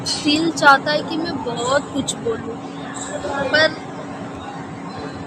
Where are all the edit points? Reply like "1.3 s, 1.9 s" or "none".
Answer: none

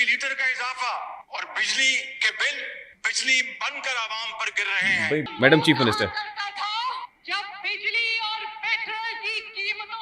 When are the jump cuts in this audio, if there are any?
5.2 s

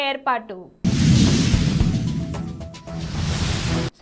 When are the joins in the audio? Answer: none

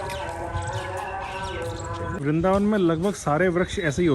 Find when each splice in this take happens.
2.2 s

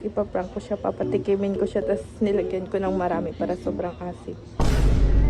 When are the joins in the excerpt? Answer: 4.4 s

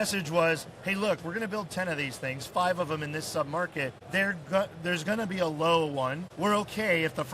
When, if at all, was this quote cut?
4.0 s, 6.2 s

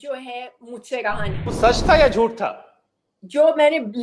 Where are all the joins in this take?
1.6 s

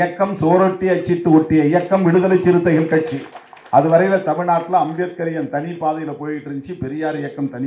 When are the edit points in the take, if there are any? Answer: none

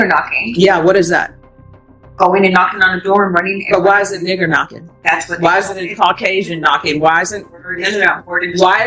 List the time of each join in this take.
5.6 s

